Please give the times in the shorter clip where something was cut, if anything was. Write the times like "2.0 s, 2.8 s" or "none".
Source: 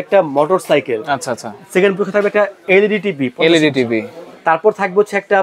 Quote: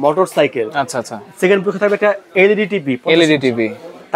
none